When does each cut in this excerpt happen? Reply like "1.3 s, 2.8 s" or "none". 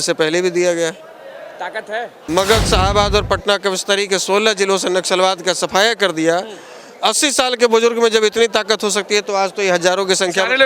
2.1 s

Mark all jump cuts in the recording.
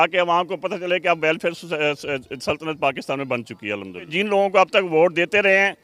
4.1 s

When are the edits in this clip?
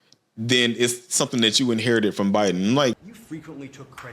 3.1 s

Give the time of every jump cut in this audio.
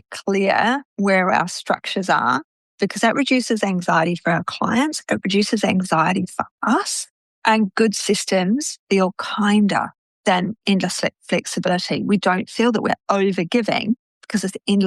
none

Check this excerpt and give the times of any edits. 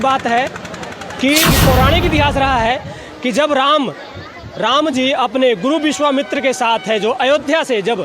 1.6 s

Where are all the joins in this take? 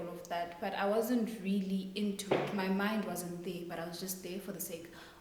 none

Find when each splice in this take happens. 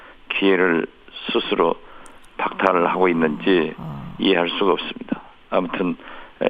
none

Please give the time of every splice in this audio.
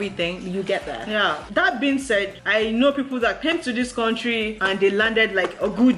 none

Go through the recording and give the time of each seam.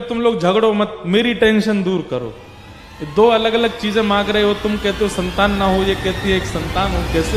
none

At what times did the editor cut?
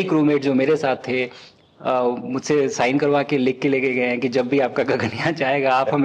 none

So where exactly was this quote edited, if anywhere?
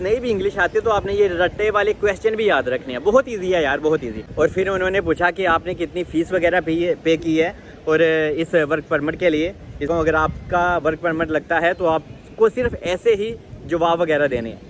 4.4 s, 9.9 s

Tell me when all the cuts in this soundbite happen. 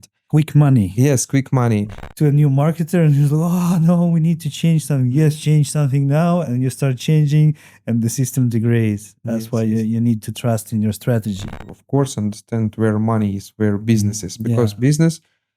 2.0 s, 11.6 s

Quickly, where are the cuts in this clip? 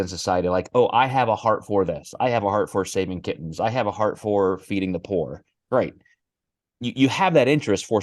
none

